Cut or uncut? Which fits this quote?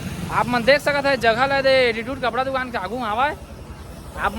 uncut